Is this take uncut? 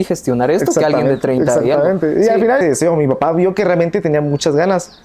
no; 1 cut; at 2.6 s

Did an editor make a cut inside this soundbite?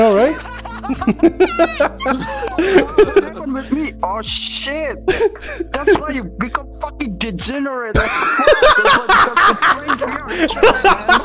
no; 0 cuts

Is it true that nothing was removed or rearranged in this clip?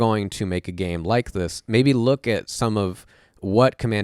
yes; 0 cuts

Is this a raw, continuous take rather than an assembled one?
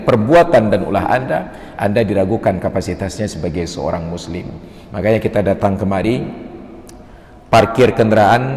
yes; 0 cuts

